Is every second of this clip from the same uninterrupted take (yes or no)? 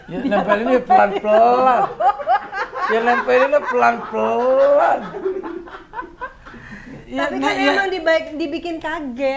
yes